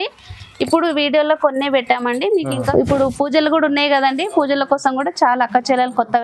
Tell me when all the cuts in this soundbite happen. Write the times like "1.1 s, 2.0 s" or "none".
2.7 s